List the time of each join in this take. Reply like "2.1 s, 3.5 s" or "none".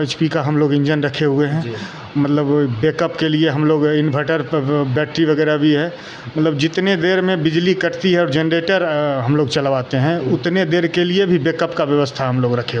none

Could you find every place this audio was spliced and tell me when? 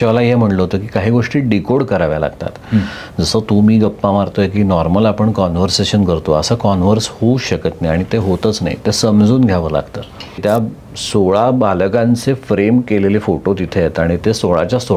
10.4 s

